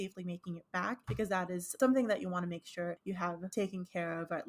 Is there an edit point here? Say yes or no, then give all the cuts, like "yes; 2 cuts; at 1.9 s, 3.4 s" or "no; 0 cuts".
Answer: yes; 2 cuts; at 1.5 s, 3.4 s